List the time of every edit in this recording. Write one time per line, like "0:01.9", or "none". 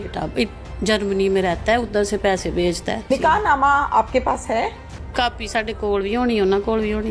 0:03.1
0:05.1